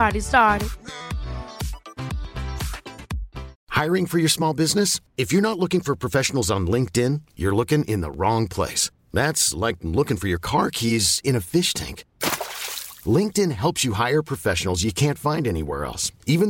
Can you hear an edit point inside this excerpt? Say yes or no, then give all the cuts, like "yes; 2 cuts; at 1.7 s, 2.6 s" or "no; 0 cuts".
yes; 1 cut; at 3.6 s